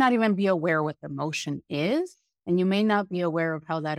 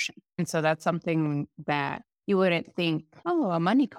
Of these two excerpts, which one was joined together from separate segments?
second; 2 cuts; at 2.1 s, 3.1 s

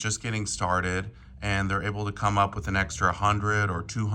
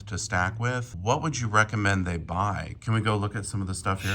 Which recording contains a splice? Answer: second; 1 cut; at 0.9 s

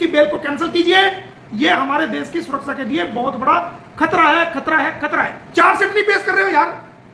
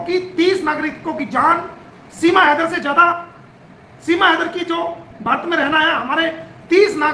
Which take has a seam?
first; 1 cut; at 5.4 s

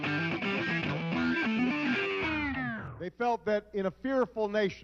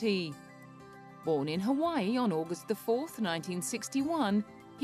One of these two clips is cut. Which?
first; 1 cut; at 3.7 s

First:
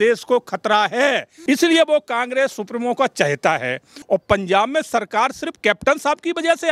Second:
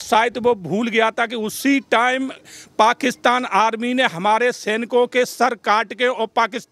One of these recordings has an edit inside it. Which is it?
first; 2 cuts; at 1.3 s, 3.9 s

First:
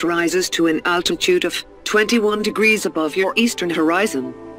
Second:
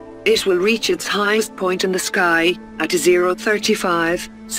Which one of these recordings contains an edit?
first; 2 cuts; at 1.6 s, 3.0 s

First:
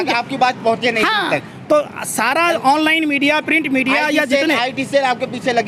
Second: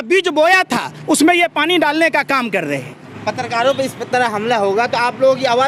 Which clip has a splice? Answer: second; 1 cut; at 3.1 s

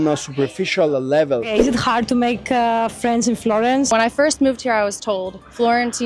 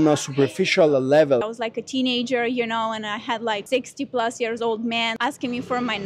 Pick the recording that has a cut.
second; 3 cuts; at 1.4 s, 3.6 s, 5.2 s

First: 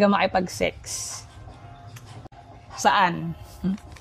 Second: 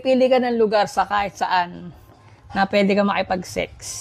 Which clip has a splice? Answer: first; 1 cut; at 2.2 s

